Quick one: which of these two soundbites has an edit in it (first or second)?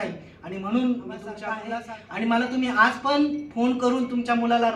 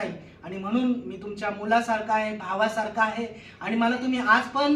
first